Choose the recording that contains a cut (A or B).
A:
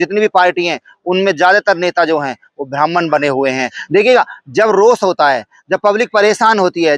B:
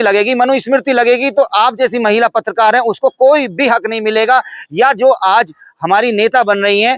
A